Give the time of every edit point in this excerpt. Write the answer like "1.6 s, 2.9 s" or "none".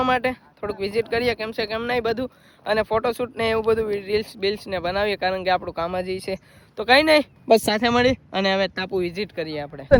none